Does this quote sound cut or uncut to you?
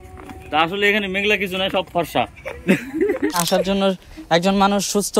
cut